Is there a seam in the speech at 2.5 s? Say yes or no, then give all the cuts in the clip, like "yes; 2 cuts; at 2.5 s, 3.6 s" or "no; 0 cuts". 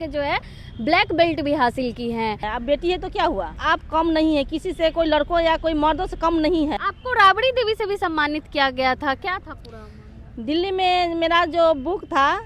yes; 3 cuts; at 2.5 s, 3.6 s, 6.8 s